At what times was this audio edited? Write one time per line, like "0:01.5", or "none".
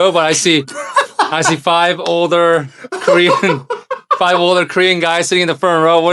none